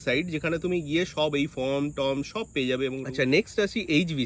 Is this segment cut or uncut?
cut